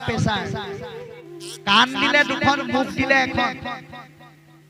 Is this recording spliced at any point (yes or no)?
yes